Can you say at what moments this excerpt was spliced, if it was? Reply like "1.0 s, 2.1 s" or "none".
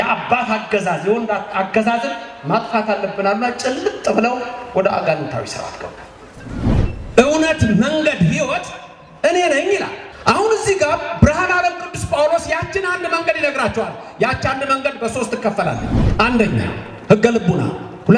6.7 s, 10.0 s, 16.0 s